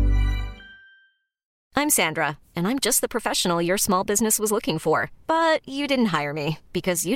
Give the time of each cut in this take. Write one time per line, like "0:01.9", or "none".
0:01.6